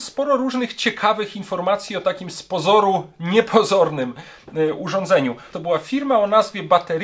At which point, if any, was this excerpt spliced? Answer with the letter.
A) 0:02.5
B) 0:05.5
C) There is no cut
B